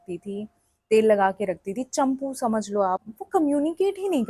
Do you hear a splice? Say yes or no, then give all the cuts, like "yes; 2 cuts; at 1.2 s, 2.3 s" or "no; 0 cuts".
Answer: yes; 1 cut; at 3.1 s